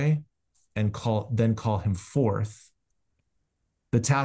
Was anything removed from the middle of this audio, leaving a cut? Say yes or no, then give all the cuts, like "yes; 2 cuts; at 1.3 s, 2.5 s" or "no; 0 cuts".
no; 0 cuts